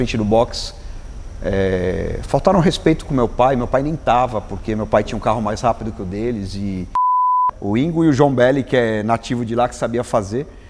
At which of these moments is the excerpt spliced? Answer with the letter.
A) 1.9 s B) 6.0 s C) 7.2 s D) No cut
C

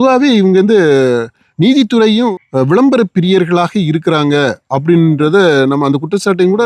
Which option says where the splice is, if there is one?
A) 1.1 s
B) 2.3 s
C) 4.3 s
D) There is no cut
B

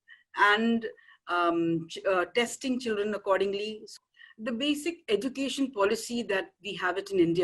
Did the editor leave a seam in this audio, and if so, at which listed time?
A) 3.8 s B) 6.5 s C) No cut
A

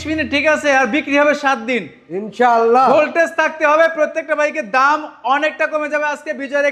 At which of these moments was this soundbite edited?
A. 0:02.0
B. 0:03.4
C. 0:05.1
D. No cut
D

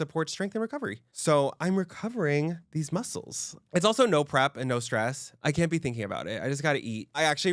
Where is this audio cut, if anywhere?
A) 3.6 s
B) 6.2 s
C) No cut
A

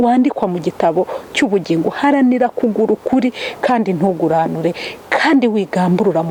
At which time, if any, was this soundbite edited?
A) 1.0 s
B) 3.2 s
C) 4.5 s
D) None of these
D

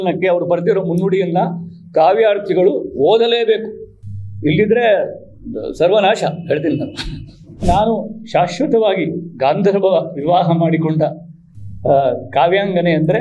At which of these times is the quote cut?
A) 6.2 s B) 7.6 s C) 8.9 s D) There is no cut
B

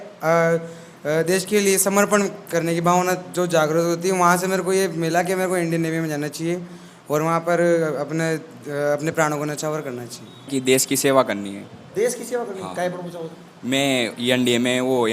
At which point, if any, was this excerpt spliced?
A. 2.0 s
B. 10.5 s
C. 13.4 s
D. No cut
B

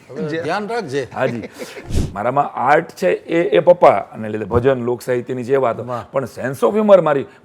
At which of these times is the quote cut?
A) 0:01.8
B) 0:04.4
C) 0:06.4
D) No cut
A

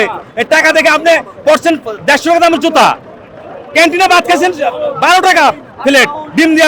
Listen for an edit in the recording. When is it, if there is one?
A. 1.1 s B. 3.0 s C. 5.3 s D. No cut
D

